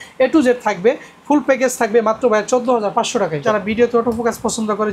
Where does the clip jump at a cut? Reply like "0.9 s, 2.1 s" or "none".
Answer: 3.4 s